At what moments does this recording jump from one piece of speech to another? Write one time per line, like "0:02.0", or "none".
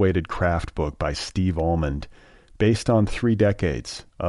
none